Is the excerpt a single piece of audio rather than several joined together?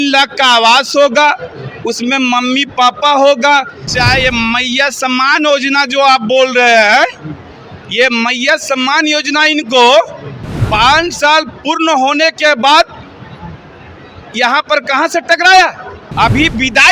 no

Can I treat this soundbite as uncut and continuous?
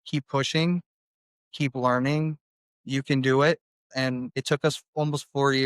no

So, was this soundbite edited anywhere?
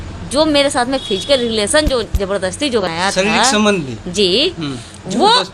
yes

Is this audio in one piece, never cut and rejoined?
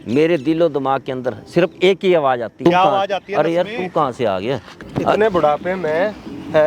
no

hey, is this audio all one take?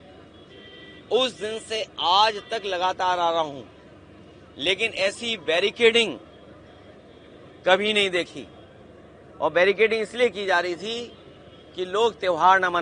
yes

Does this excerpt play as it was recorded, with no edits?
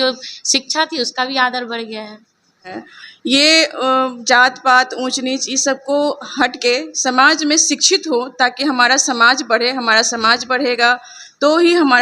no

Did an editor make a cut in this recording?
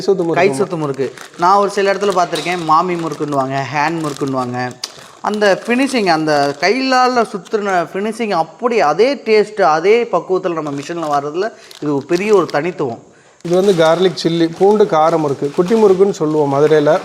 yes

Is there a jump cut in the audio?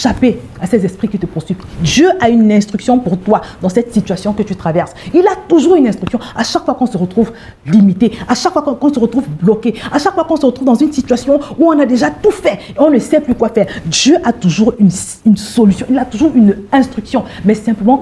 no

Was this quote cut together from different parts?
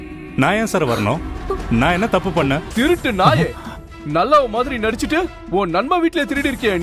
yes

